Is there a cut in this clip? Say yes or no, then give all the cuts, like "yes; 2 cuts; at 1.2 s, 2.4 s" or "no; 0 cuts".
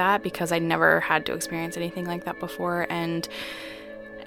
no; 0 cuts